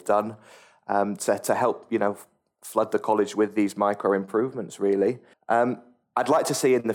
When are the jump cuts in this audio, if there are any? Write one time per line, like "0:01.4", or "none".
0:05.3
0:05.9